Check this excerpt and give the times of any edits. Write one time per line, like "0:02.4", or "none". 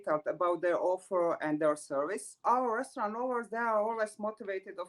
0:02.2